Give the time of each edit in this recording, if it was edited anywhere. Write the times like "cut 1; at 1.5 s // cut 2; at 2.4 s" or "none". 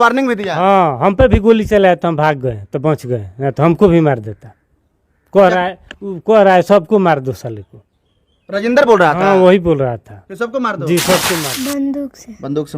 cut 1; at 11.5 s

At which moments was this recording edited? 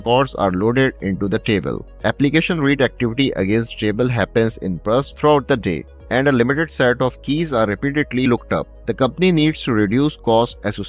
cut 1; at 1.8 s // cut 2; at 5.9 s // cut 3; at 8.8 s

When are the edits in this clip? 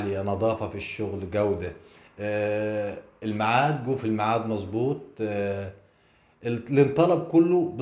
none

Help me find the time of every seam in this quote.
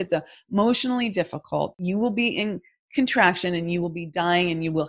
cut 1; at 1.8 s

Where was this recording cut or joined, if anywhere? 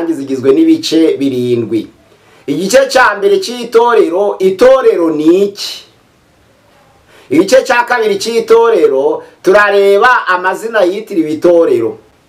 none

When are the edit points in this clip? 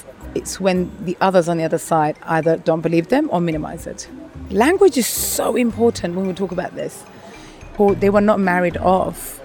cut 1; at 4.4 s // cut 2; at 7.6 s

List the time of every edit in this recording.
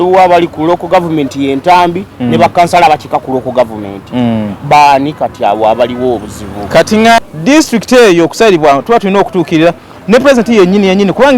cut 1; at 7.2 s

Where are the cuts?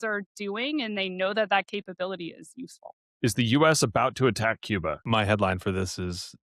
cut 1; at 3.1 s // cut 2; at 5.0 s

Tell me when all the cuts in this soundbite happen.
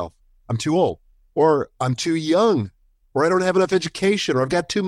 none

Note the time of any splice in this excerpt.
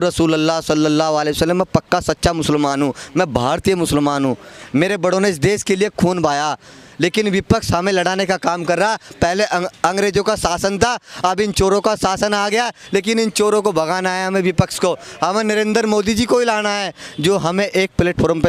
none

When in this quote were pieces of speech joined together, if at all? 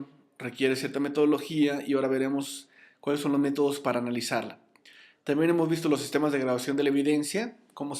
cut 1; at 7.0 s

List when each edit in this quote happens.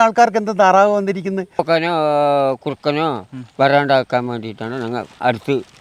cut 1; at 1.6 s

